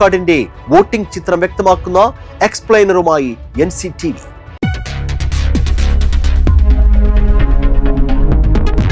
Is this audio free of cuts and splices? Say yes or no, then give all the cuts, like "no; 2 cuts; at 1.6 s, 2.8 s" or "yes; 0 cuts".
yes; 0 cuts